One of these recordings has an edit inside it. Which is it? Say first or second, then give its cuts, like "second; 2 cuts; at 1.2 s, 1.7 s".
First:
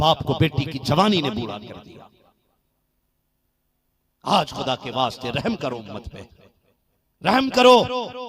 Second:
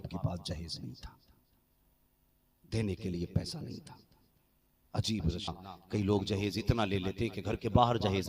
second; 1 cut; at 5.5 s